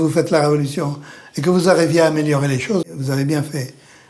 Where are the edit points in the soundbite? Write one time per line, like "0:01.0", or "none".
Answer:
0:02.8

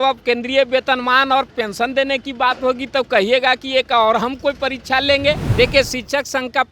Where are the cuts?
0:05.5

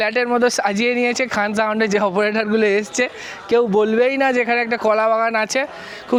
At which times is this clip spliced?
none

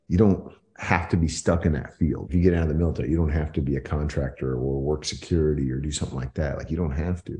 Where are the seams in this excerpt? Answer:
0:02.2

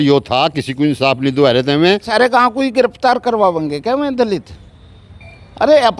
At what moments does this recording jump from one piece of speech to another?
0:02.1

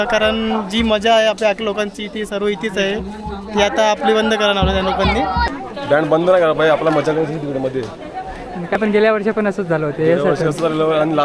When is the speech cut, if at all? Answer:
0:05.5
0:08.8

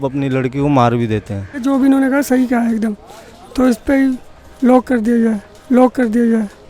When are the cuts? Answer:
0:01.6

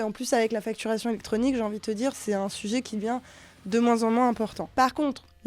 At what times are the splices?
0:02.2
0:04.6

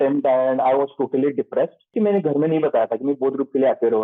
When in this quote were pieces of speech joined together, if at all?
0:01.9

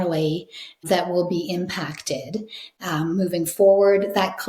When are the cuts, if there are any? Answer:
0:02.8

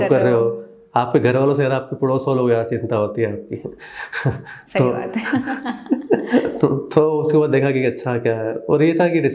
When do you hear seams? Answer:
none

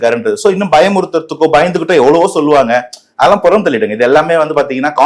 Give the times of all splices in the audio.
none

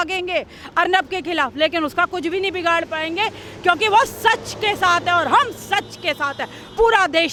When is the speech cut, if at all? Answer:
none

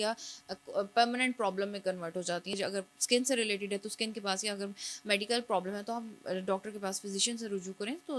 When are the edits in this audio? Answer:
0:02.6

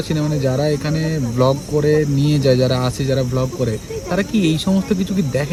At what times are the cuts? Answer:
none

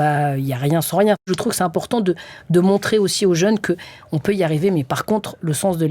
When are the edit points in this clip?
0:01.3

